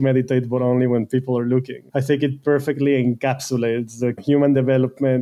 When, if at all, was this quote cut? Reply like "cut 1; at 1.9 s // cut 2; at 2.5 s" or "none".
cut 1; at 1.8 s // cut 2; at 4.2 s